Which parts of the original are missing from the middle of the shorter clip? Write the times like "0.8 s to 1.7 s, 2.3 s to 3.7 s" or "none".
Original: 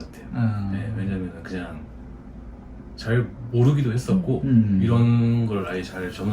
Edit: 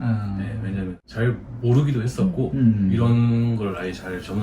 1.4 s to 2.9 s